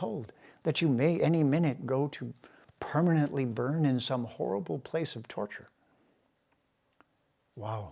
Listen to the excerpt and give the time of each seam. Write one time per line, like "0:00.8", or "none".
none